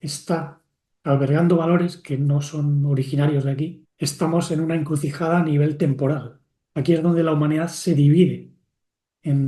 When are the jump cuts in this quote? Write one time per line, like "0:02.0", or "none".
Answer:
0:03.8